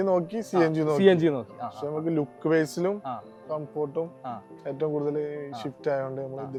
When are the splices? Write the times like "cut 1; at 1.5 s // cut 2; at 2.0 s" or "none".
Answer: none